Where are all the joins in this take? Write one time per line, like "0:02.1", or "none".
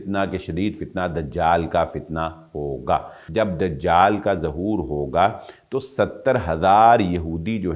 0:03.2